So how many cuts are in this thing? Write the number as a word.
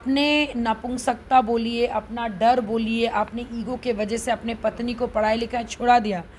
zero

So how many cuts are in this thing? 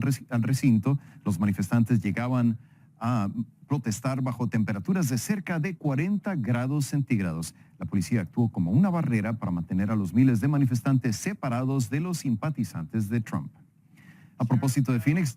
one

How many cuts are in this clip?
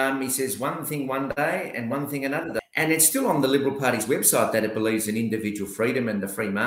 one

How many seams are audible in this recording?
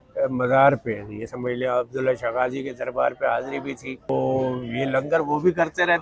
one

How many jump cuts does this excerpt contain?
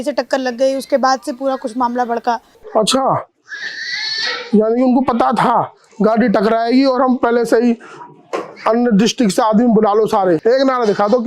two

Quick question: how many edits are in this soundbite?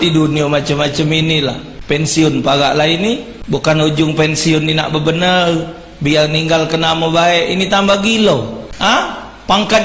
three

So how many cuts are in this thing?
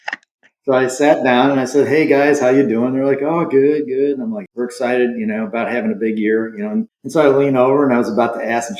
two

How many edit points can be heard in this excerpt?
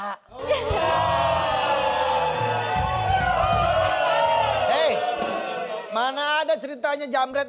zero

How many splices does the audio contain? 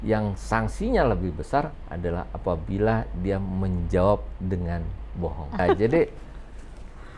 one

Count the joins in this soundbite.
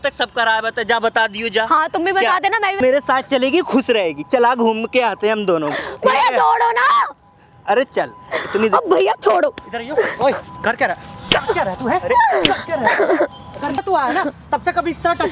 two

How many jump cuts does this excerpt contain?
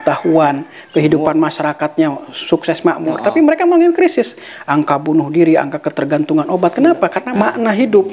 one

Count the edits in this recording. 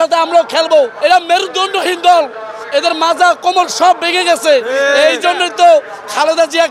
one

